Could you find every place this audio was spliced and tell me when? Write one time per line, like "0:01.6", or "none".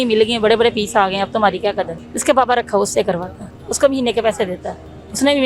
0:02.0

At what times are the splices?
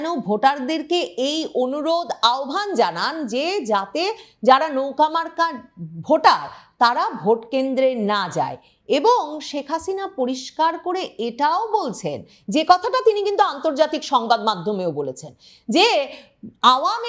none

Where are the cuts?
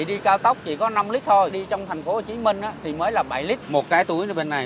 0:01.6
0:02.8
0:03.6

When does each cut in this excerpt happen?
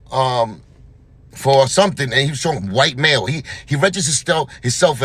none

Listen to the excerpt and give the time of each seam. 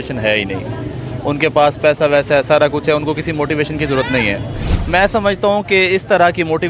0:04.7

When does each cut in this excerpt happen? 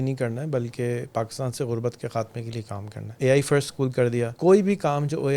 0:03.1
0:04.3

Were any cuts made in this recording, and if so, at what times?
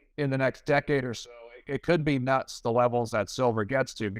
none

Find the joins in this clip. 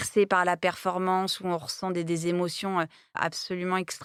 none

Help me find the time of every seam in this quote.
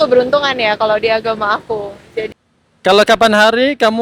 0:02.3

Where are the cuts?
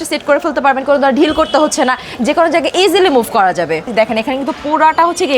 0:03.8

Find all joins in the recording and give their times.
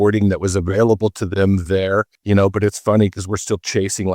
0:02.2

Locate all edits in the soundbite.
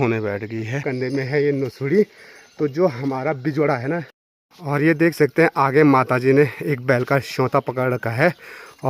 0:00.9
0:04.2

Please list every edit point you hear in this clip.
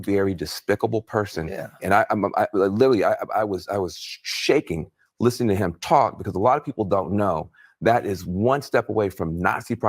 0:03.6

